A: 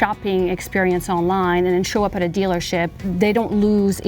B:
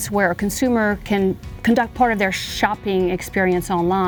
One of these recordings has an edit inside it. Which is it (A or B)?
A